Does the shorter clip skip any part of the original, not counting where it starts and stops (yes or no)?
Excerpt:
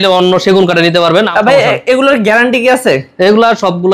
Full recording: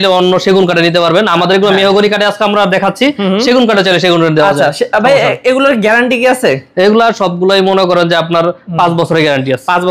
yes